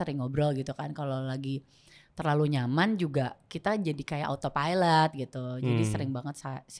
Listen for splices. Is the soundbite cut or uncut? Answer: uncut